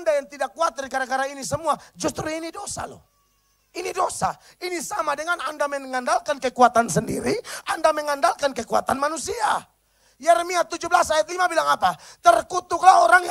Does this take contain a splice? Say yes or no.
no